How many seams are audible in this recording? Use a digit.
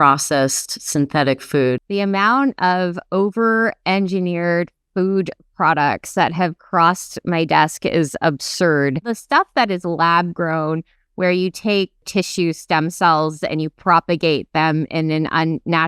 3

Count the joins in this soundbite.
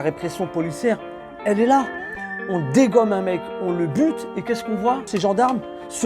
1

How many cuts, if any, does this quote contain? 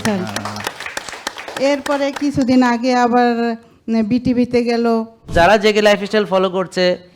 1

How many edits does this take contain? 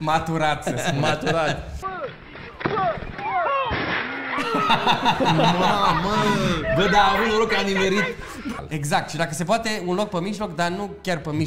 2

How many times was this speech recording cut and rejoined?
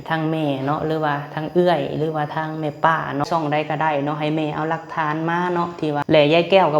2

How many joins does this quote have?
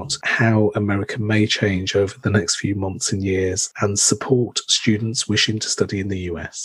1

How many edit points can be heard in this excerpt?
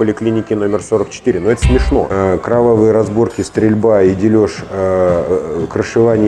1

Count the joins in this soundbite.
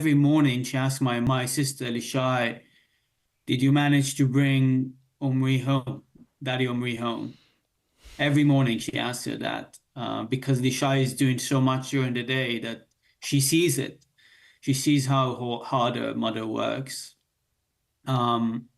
1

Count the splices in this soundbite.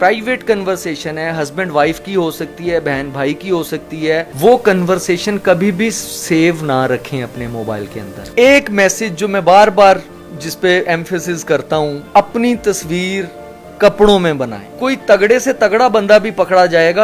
3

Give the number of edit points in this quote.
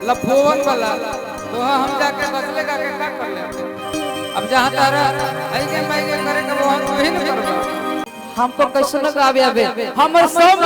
1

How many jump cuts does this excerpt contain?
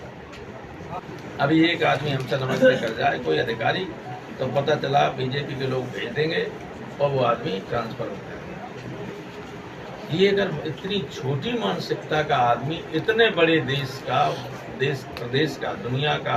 1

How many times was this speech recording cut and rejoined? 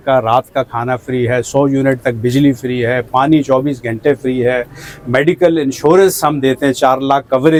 0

